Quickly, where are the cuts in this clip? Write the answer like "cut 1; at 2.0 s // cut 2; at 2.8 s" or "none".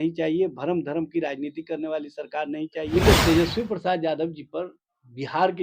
cut 1; at 3.0 s